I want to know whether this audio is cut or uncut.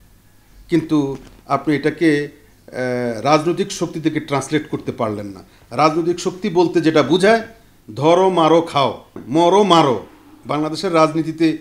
cut